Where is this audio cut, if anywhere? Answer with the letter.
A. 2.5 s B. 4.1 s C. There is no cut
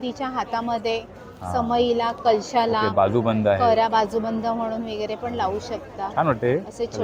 C